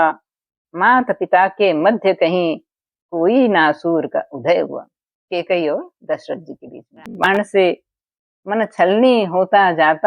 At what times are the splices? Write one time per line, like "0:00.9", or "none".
0:07.3

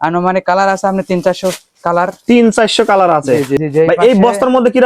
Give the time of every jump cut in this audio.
0:03.5

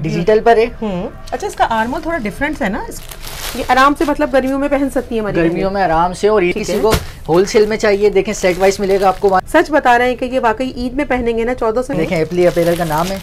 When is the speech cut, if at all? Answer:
0:02.9
0:06.6
0:09.4
0:11.9

